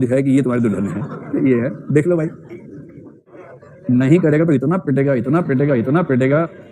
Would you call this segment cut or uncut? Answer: cut